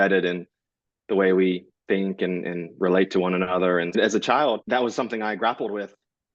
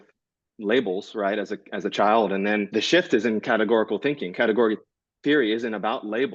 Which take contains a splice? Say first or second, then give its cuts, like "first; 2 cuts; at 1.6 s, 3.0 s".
first; 2 cuts; at 3.9 s, 4.6 s